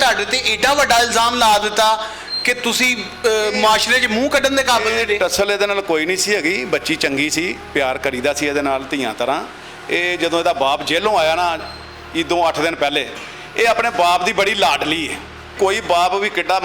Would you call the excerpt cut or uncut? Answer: cut